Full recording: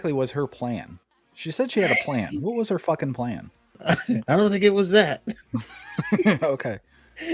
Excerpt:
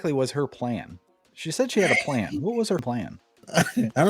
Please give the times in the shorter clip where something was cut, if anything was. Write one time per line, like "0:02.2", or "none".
0:02.8

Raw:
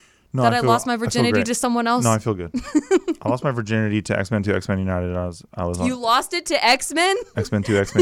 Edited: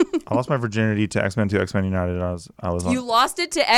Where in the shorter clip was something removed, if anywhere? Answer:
none

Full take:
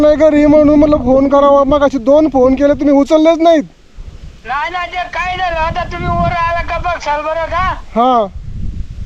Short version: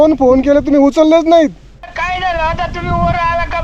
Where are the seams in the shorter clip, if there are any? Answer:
0:01.9

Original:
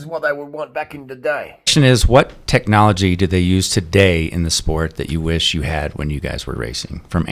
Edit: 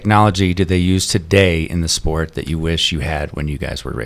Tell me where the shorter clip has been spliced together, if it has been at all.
none

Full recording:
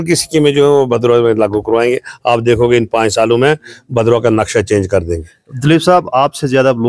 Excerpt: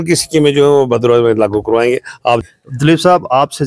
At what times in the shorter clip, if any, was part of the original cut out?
0:02.4

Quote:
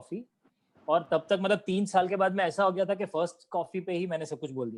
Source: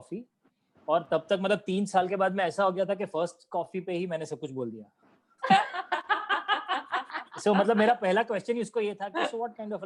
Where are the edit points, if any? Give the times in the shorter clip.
none

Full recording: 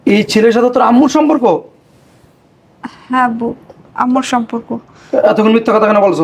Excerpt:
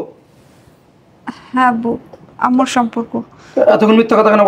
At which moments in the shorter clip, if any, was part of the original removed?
none

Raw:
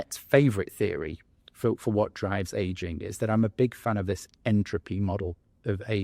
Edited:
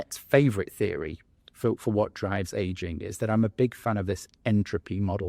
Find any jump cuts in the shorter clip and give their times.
none

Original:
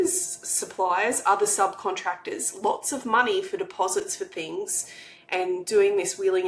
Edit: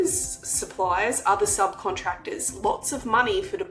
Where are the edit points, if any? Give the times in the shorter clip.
none

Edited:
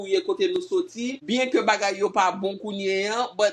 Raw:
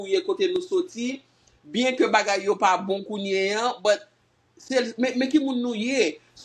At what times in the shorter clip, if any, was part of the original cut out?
0:01.2

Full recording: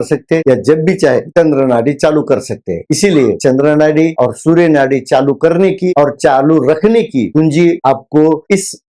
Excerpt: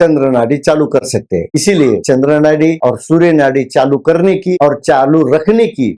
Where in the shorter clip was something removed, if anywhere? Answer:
none

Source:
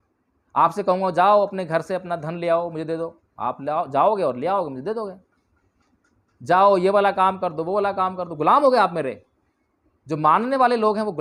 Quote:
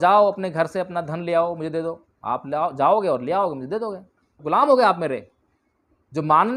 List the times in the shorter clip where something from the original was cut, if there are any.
0:04.3

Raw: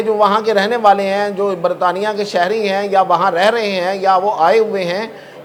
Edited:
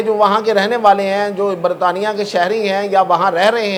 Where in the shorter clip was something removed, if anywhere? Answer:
none

